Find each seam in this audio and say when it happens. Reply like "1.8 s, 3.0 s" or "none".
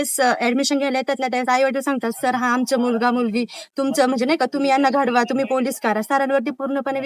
none

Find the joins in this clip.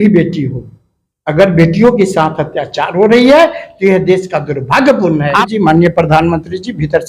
5.4 s

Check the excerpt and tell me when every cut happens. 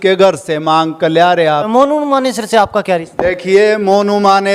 1.7 s

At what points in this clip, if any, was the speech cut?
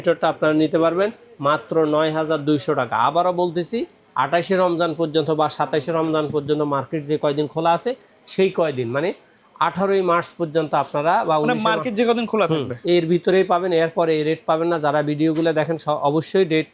none

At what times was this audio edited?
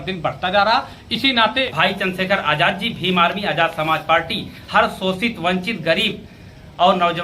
1.7 s

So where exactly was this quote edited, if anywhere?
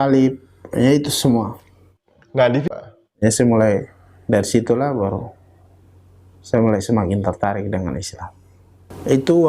2.7 s

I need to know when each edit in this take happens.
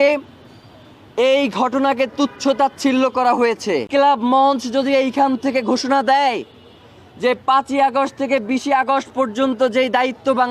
3.9 s

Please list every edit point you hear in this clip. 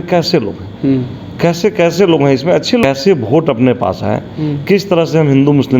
2.8 s

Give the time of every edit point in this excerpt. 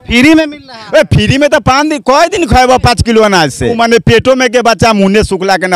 3.7 s

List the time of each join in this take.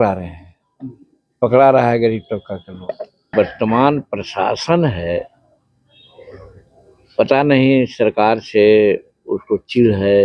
3.3 s

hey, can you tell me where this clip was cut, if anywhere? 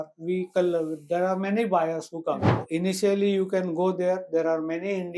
2.6 s

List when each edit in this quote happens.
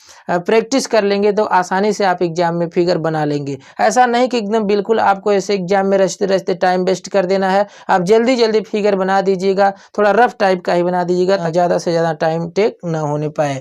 11.4 s

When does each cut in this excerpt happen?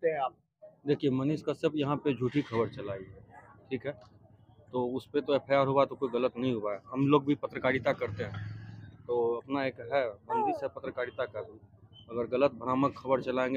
none

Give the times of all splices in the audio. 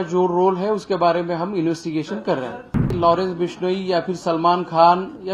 2.9 s

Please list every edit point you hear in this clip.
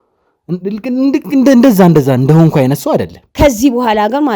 3.2 s

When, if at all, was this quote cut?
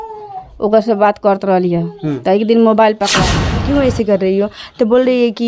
3.6 s

